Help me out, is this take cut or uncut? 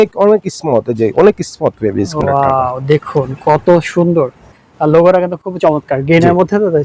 cut